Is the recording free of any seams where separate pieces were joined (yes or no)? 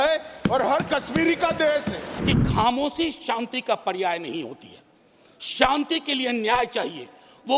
no